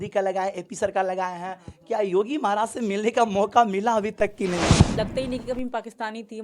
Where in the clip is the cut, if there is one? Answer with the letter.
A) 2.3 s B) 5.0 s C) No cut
B